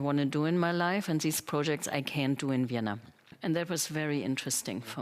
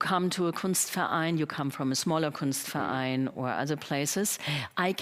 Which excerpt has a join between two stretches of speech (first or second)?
first